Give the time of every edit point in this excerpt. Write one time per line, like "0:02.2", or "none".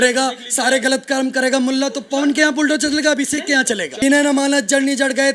0:03.9